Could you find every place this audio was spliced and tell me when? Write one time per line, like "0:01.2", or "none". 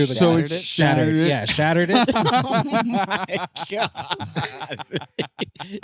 none